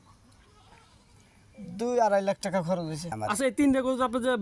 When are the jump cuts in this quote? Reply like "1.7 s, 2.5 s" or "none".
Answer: 3.2 s